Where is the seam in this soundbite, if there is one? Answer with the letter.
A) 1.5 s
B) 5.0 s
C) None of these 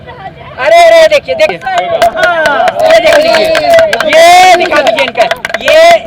A